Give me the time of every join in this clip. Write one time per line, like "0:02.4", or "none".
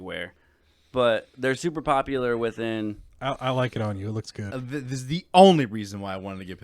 0:04.6